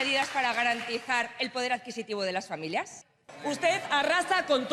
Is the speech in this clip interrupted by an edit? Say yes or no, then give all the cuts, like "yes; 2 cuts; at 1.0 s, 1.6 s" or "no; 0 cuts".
yes; 1 cut; at 3.3 s